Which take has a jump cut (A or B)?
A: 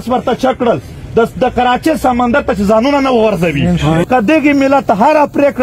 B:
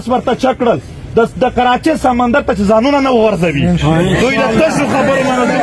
A